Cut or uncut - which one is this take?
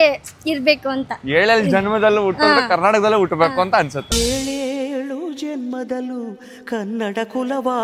uncut